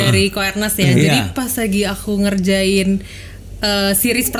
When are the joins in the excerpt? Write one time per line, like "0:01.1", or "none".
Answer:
none